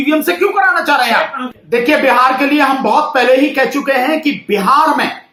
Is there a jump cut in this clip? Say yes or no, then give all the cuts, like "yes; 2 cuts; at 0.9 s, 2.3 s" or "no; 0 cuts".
no; 0 cuts